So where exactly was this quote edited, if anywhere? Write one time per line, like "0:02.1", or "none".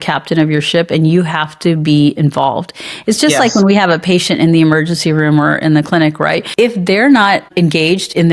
0:06.4
0:07.5